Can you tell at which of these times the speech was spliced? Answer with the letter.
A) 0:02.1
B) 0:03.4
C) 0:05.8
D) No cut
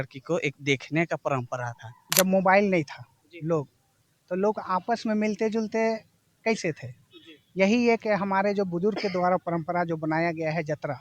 A